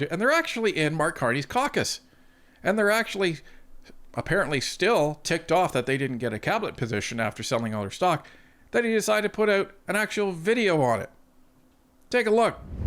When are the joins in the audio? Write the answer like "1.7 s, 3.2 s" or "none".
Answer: none